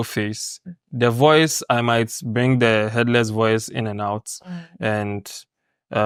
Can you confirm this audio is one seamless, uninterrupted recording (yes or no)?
yes